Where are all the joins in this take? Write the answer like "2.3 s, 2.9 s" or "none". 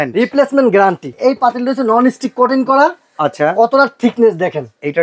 1.1 s

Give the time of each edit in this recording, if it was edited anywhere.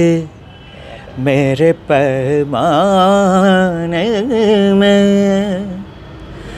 none

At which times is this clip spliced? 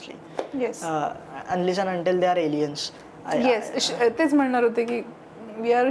none

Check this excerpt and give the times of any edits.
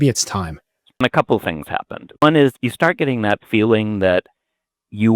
1.0 s, 2.2 s

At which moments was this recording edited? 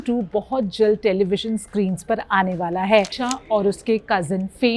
3.1 s

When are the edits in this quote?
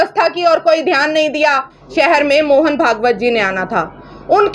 1.8 s

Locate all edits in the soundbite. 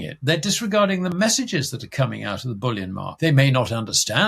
3.1 s

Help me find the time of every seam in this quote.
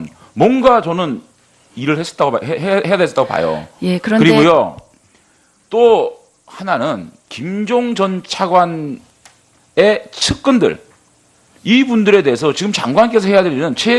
3.1 s

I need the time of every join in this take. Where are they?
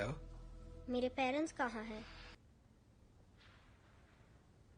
2.4 s

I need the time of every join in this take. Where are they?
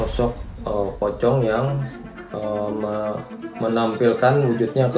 none

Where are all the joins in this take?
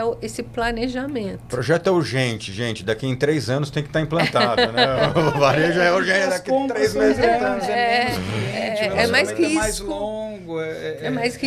none

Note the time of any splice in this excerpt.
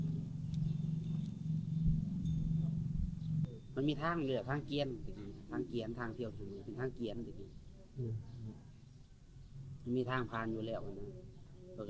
3.4 s

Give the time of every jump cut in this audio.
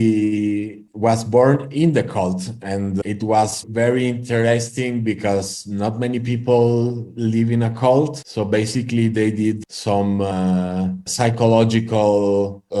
none

